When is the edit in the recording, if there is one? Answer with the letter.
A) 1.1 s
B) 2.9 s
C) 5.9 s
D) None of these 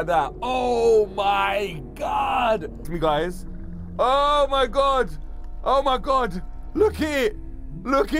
B